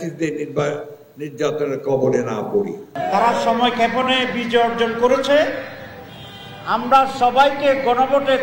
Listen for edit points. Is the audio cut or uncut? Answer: cut